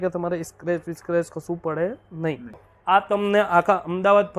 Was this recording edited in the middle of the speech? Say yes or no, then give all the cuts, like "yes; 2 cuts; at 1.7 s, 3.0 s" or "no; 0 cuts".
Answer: yes; 1 cut; at 2.7 s